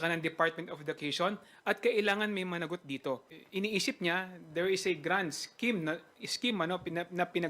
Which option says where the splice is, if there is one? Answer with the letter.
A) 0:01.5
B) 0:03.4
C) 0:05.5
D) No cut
B